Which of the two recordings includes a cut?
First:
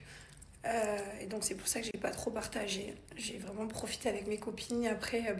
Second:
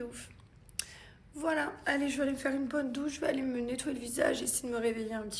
first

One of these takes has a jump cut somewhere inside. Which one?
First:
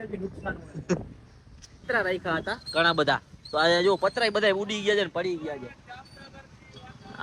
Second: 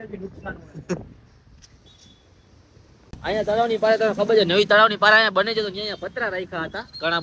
first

